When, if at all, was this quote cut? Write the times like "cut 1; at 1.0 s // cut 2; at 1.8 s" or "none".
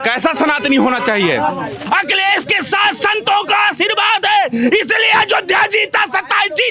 cut 1; at 1.8 s